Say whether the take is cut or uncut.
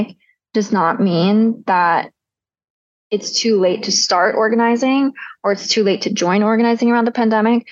uncut